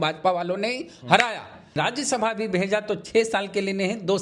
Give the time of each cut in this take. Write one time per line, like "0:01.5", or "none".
0:01.8